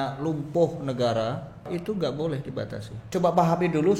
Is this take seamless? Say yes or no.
no